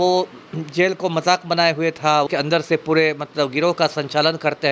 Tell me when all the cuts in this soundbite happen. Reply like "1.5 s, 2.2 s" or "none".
2.3 s